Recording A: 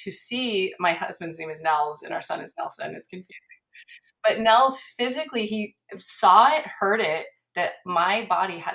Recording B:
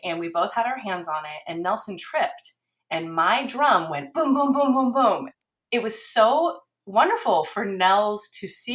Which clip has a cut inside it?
B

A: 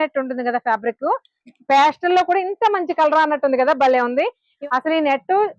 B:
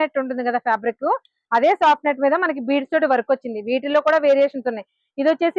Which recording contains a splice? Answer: A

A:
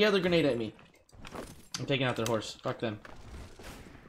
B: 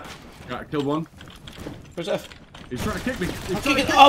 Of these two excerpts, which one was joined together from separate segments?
A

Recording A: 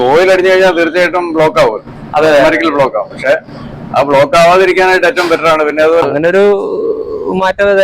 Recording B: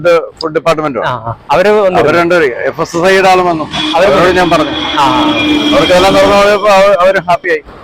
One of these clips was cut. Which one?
A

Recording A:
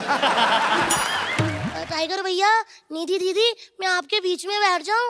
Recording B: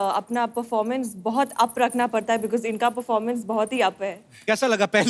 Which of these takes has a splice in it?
A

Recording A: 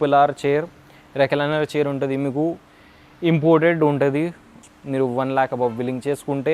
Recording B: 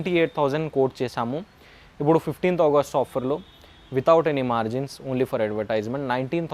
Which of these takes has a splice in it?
A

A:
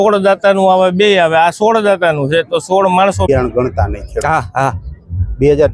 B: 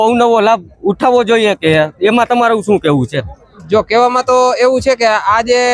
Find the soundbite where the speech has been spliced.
A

